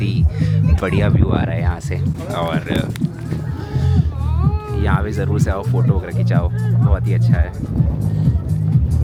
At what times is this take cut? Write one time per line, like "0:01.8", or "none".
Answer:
none